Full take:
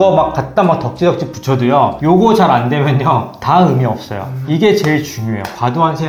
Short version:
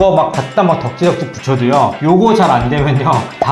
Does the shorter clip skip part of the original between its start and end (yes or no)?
no